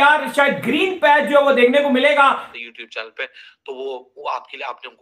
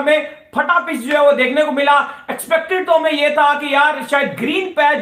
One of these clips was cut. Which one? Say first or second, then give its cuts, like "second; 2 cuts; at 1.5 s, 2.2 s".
first; 1 cut; at 2.5 s